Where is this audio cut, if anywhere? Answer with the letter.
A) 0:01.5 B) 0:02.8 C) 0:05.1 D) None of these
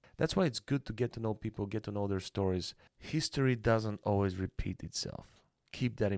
B